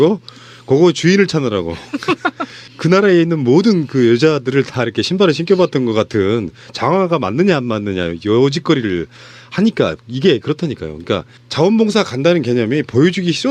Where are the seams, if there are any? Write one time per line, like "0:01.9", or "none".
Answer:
0:05.1